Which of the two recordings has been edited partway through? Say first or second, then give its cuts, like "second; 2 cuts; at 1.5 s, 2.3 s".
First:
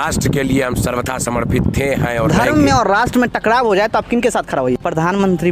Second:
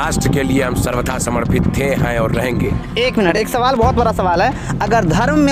first; 2 cuts; at 2.3 s, 4.7 s